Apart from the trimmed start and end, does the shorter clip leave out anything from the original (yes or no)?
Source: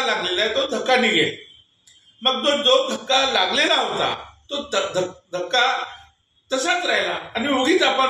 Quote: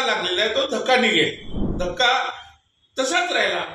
yes